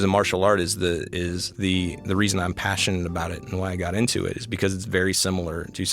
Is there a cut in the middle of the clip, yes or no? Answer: yes